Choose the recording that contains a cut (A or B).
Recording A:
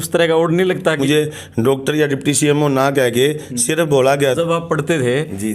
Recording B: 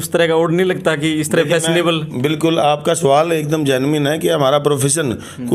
A